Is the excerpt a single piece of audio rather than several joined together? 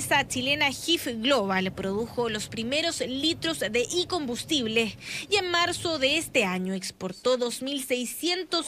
yes; 0 cuts

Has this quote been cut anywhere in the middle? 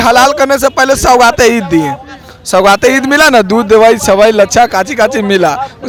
no; 0 cuts

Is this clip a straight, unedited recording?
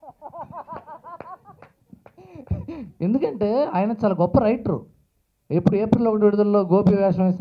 yes; 0 cuts

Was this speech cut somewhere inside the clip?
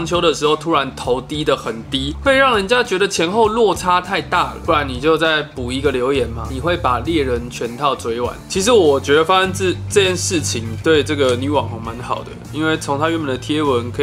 yes; 1 cut; at 8.4 s

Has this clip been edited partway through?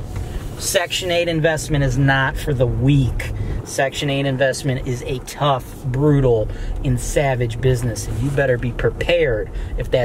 no; 0 cuts

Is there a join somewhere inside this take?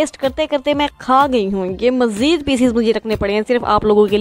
no; 0 cuts

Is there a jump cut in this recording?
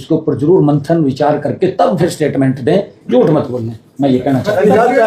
no; 0 cuts

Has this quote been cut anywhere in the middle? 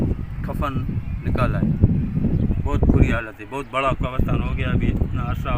yes; 1 cut; at 2.4 s

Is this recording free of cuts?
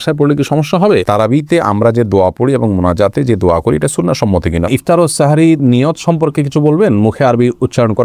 no; 2 cuts; at 1.0 s, 4.7 s

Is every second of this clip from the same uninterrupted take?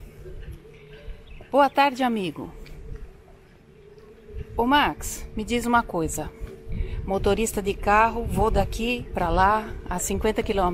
yes; 0 cuts

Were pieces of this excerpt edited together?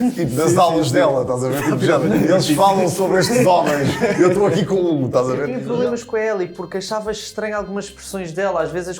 yes; 1 cut; at 5.5 s

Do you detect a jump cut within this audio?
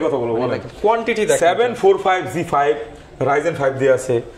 no; 0 cuts

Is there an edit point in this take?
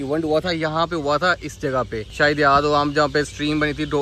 no; 0 cuts

